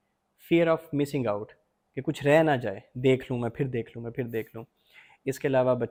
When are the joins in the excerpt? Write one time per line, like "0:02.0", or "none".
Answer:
none